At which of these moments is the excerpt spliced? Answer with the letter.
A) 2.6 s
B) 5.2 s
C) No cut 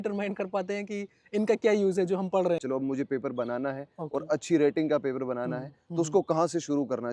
A